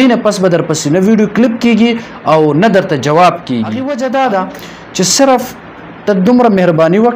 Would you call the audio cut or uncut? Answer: cut